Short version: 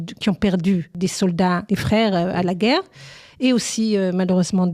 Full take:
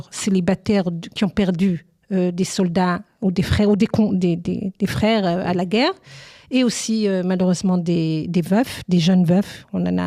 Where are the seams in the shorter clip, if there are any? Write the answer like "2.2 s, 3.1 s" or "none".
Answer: 1.3 s